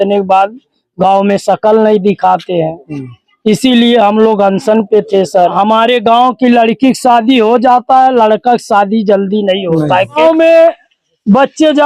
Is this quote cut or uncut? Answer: cut